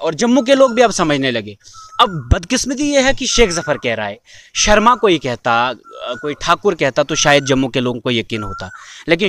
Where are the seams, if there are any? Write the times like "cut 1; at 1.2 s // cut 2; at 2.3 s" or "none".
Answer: none